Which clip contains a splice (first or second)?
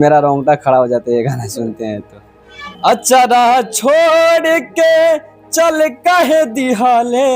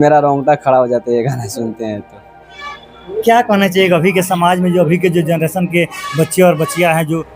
first